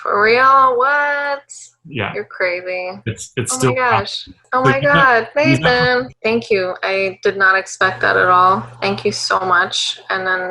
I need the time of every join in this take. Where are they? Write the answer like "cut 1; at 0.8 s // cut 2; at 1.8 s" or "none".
cut 1; at 6.1 s